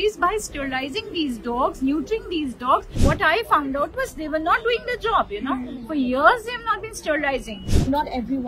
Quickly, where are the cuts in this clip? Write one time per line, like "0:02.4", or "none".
0:02.9
0:07.6